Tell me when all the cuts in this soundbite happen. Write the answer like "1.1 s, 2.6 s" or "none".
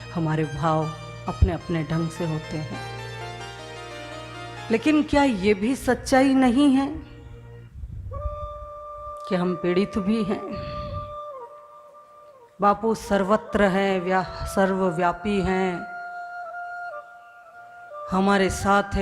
none